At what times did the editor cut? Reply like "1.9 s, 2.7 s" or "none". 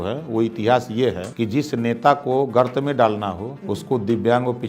1.3 s, 3.8 s